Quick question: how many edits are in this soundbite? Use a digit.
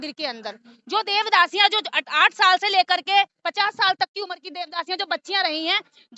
0